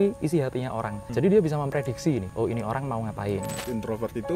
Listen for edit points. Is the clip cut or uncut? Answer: cut